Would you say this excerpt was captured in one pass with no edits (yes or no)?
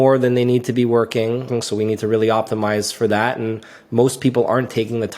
no